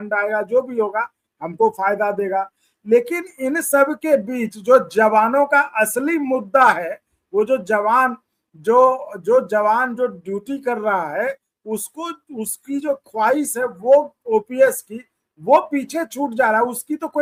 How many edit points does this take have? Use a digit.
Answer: 0